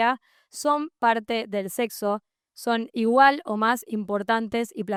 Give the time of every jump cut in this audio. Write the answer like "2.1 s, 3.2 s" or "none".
none